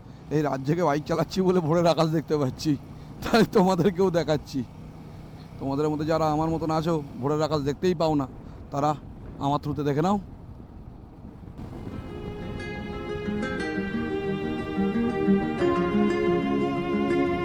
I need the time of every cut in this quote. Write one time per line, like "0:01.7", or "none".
none